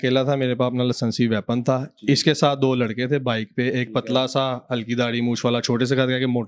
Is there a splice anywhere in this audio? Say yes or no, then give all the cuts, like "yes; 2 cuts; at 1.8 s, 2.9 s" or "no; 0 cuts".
no; 0 cuts